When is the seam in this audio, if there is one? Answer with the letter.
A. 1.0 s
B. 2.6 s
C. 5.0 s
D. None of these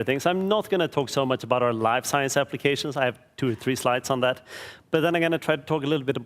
C